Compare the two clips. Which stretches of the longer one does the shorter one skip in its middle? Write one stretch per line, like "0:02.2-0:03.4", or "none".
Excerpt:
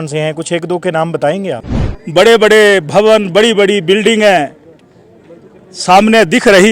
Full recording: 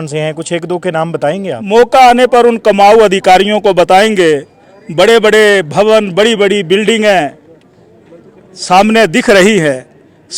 0:01.6-0:04.4